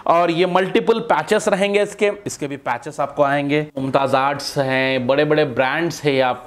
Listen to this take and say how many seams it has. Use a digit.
2